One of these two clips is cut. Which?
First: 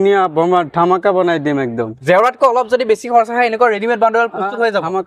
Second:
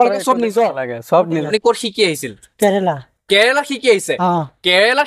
second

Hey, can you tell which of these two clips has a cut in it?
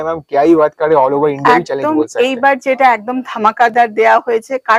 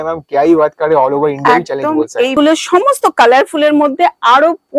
second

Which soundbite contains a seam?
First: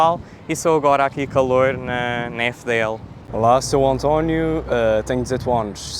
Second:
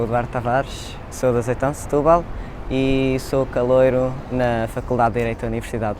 first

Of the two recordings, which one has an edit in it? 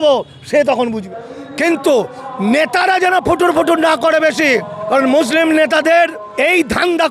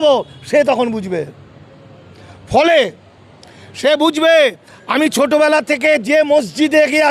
first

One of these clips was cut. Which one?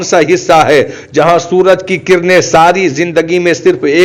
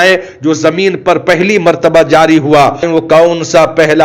second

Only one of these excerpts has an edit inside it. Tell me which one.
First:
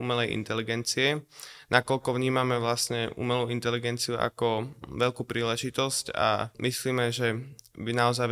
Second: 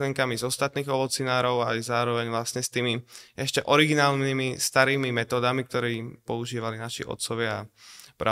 first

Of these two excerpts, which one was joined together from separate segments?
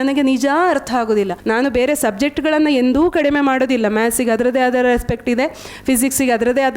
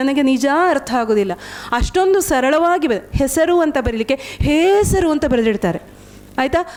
first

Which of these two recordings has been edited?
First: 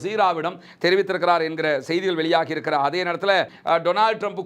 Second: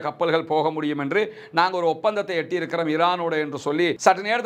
first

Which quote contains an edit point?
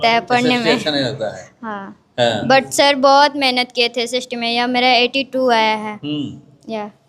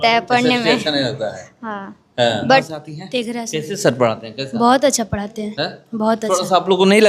second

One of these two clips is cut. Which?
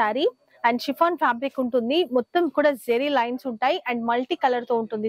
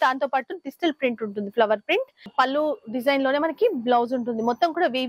second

